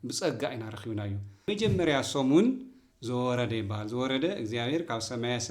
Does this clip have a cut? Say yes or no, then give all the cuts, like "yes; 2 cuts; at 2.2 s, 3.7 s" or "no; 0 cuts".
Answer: yes; 1 cut; at 1.5 s